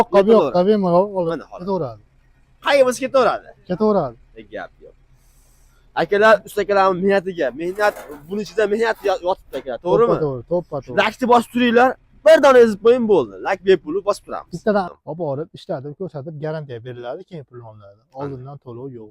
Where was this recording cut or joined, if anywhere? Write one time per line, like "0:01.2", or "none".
0:14.9